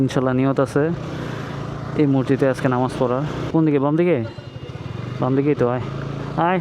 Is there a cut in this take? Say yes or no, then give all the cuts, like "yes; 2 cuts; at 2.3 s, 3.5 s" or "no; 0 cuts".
no; 0 cuts